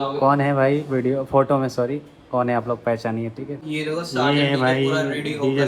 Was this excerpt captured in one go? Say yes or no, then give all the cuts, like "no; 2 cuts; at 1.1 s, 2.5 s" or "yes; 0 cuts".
no; 1 cut; at 3.6 s